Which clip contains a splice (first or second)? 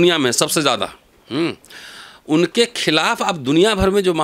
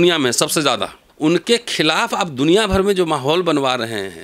second